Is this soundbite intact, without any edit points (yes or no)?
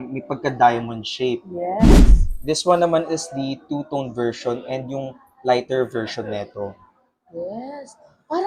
no